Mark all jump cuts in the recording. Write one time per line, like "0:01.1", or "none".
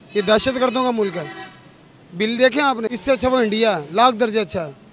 0:02.9